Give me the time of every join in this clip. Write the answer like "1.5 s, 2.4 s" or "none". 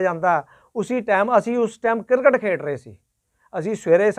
none